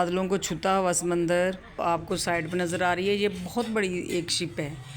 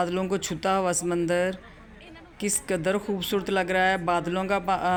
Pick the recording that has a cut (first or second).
first